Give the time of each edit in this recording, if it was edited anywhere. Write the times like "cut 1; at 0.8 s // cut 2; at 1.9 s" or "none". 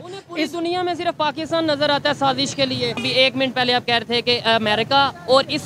cut 1; at 3.0 s